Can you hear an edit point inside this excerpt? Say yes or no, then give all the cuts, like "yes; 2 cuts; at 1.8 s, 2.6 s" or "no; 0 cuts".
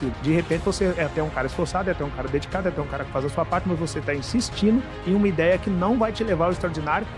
no; 0 cuts